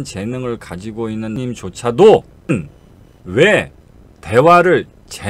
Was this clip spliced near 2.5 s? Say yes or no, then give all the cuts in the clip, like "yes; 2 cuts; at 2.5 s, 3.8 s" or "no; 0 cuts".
yes; 1 cut; at 2.5 s